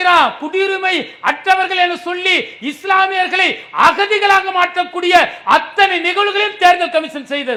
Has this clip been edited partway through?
no; 0 cuts

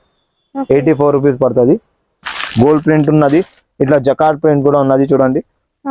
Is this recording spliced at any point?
yes; 1 cut; at 2.3 s

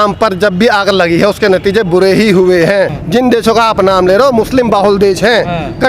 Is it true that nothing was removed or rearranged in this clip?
no; 1 cut; at 3.0 s

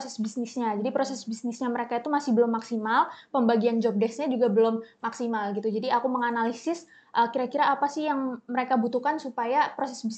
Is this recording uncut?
yes; 0 cuts

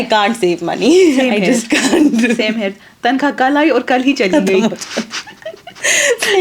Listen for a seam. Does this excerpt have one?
no; 0 cuts

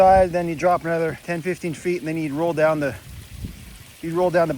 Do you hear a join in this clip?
yes; 1 cut; at 1.2 s

